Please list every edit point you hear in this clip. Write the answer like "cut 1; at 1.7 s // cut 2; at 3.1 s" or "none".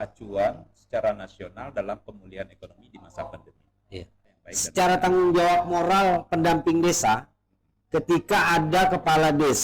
cut 1; at 4.4 s